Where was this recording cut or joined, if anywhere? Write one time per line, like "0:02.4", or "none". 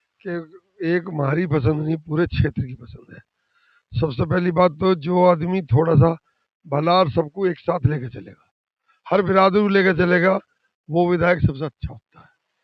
none